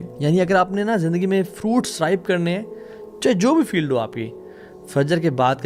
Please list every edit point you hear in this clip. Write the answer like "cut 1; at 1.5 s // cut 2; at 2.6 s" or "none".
none